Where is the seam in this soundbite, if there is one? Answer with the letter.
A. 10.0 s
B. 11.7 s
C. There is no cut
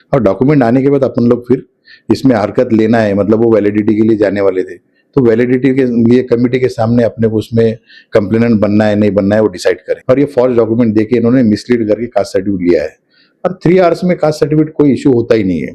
A